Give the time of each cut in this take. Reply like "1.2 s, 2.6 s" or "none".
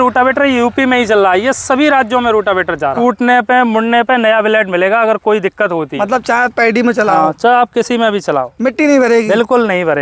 2.9 s, 5.9 s